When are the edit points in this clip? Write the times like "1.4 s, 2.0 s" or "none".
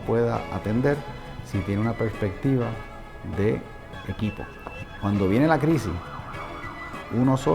3.9 s, 4.9 s